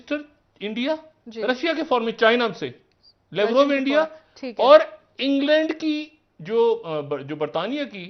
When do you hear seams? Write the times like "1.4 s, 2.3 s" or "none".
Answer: none